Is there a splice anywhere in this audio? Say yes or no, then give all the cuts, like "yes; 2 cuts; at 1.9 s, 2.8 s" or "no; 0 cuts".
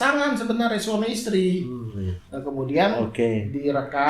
no; 0 cuts